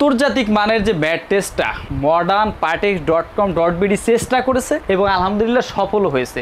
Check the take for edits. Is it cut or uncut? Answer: uncut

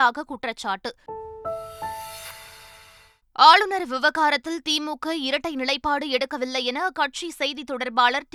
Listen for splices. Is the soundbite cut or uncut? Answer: uncut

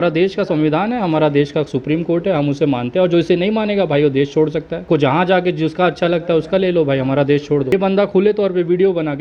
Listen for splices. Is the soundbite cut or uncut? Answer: cut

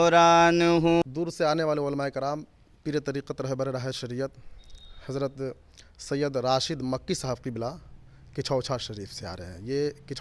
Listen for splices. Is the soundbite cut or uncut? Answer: cut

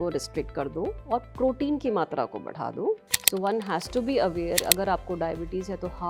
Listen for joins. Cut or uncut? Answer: cut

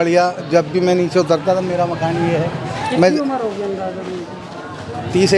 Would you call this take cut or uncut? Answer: uncut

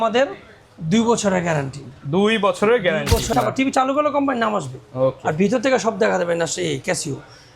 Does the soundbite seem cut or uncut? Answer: cut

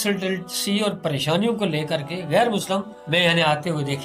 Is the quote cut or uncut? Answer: cut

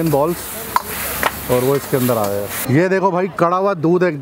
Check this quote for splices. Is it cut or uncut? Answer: cut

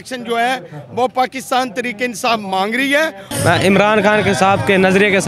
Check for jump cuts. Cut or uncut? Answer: cut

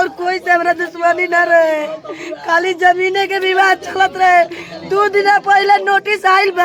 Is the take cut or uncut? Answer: uncut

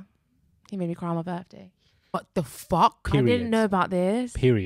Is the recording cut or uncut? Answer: cut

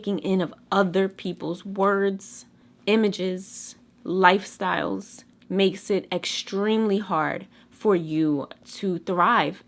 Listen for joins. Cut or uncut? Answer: uncut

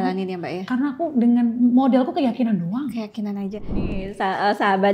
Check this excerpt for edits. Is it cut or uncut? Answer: cut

